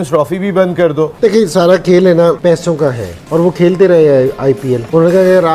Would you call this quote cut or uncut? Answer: cut